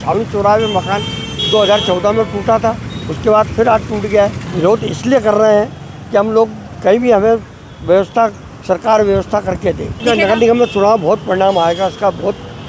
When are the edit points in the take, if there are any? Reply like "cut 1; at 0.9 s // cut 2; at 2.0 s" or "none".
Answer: cut 1; at 4.4 s // cut 2; at 10.0 s